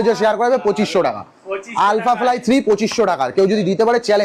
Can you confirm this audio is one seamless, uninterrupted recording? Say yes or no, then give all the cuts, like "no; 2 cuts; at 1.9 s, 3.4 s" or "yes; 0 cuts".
yes; 0 cuts